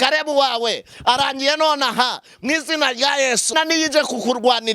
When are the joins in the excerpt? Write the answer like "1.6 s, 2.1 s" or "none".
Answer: 3.5 s